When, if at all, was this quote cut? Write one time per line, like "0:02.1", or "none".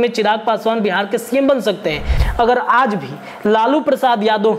0:02.1

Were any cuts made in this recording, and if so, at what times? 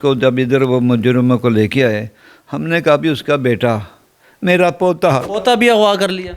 0:05.3

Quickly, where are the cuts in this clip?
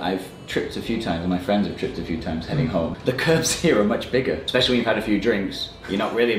0:03.0
0:04.4

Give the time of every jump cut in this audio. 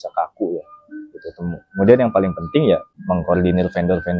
0:02.9

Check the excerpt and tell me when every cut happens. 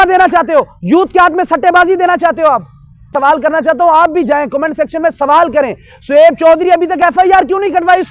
0:03.0

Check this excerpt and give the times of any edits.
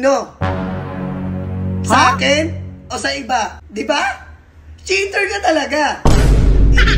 0:03.6

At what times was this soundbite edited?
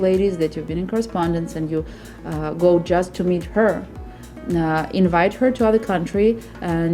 none

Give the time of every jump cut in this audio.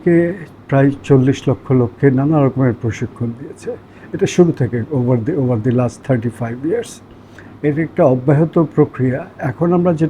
none

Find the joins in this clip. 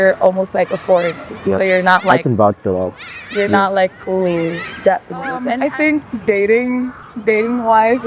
0:05.5
0:07.0

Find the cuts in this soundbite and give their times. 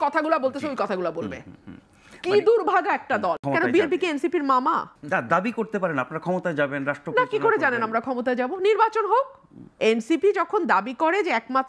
0:03.4

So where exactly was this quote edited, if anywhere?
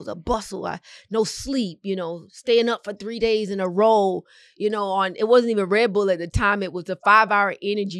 none

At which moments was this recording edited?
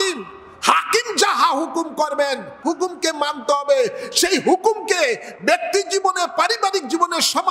0:02.5

